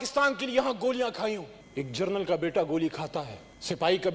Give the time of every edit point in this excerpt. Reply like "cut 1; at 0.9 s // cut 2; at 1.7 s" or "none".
none